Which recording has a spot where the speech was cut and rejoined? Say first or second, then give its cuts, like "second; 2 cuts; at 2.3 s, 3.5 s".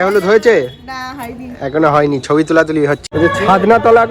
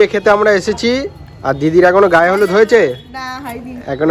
first; 1 cut; at 3.0 s